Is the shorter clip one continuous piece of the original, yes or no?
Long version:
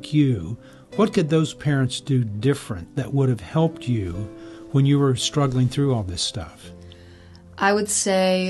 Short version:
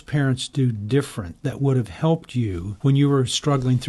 no